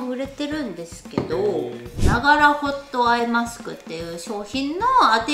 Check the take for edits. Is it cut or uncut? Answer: cut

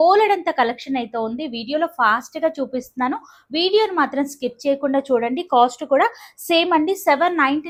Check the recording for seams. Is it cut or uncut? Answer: uncut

